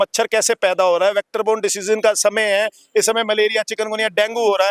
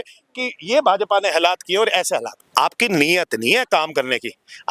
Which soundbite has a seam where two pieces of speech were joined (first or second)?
second